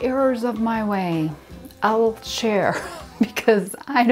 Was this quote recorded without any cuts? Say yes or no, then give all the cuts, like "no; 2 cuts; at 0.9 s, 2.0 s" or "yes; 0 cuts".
yes; 0 cuts